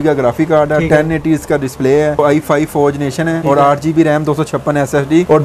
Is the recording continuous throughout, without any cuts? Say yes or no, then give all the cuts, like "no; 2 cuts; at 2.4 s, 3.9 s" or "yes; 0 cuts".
no; 2 cuts; at 2.2 s, 3.4 s